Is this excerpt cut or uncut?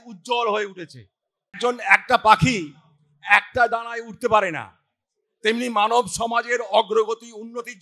cut